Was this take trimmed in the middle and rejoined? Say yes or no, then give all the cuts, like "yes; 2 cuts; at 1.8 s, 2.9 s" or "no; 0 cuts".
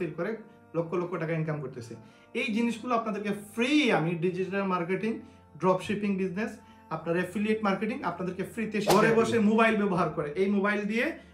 yes; 1 cut; at 8.9 s